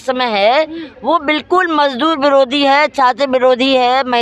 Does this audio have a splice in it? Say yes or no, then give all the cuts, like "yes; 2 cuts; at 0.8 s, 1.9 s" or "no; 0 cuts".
no; 0 cuts